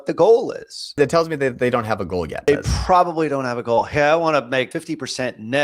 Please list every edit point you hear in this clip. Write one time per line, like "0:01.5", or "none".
0:00.9
0:02.5
0:04.7